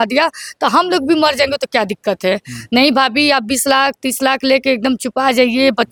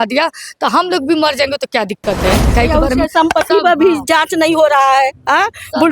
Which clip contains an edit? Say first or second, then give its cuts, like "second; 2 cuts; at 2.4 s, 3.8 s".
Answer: second; 1 cut; at 2.5 s